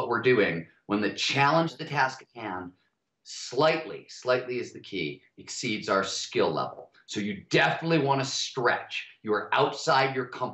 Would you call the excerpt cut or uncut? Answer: uncut